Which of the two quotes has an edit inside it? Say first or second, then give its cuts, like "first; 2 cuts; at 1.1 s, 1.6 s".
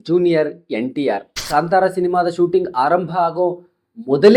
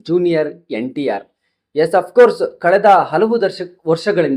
first; 1 cut; at 1.4 s